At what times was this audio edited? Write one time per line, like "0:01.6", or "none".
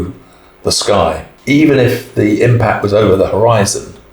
0:01.3